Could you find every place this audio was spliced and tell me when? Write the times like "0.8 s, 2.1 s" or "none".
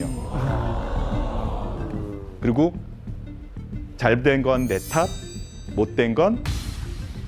none